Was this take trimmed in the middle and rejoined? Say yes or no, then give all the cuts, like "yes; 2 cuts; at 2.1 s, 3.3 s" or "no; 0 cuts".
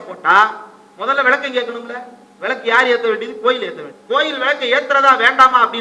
yes; 1 cut; at 3.9 s